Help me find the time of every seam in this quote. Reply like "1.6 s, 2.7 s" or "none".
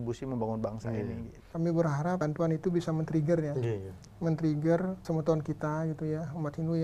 1.4 s, 2.2 s, 5.0 s